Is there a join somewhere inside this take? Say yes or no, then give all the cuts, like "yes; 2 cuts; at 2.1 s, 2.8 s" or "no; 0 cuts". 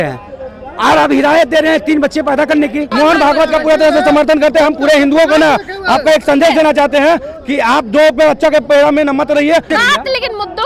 yes; 2 cuts; at 2.9 s, 9.7 s